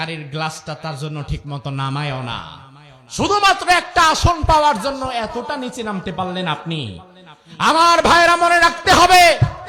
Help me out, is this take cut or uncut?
uncut